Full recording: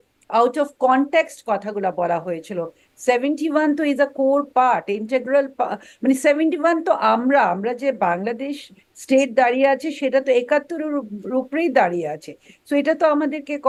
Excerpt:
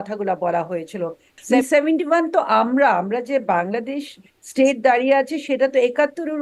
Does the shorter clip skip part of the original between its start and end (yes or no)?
yes